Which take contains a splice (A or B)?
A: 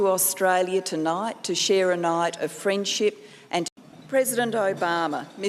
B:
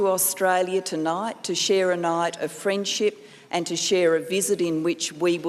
B